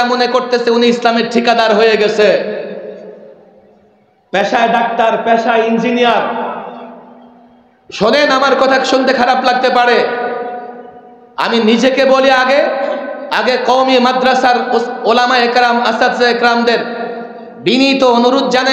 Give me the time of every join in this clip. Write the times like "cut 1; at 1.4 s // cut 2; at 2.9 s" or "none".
none